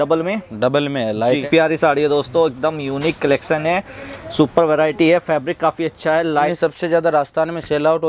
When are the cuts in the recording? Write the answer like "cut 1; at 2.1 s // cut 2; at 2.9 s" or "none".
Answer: cut 1; at 1.4 s // cut 2; at 6.5 s